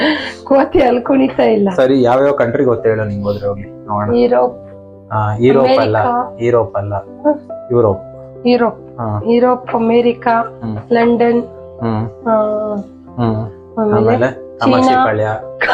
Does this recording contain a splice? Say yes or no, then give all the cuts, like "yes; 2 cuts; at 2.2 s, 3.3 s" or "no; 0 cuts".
no; 0 cuts